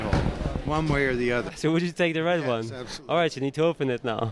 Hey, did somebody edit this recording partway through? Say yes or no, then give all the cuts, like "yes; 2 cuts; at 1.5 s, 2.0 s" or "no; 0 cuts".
no; 0 cuts